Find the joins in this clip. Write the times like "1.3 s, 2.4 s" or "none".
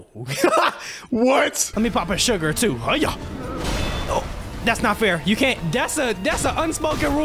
1.6 s, 5.6 s